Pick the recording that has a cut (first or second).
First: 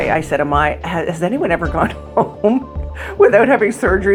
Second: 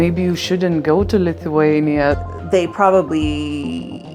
second